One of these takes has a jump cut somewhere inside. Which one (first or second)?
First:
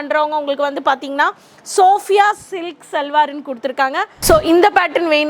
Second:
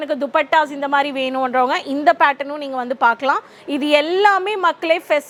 first